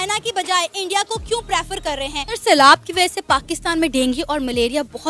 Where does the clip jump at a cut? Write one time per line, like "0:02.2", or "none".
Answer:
none